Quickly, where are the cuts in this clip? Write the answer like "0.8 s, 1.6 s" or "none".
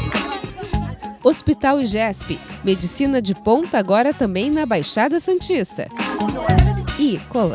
0.9 s